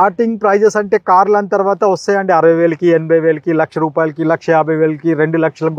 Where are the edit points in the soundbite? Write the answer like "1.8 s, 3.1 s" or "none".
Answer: none